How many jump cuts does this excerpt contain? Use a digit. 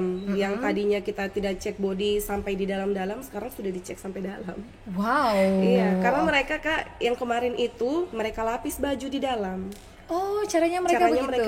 0